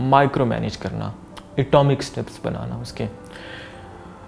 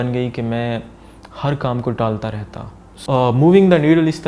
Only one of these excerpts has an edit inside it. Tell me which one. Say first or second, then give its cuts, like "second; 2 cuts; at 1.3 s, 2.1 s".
second; 1 cut; at 2.9 s